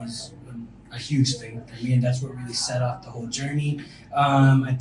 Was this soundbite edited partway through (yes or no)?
no